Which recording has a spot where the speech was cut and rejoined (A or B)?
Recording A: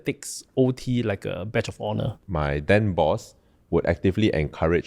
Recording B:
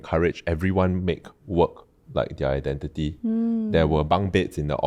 A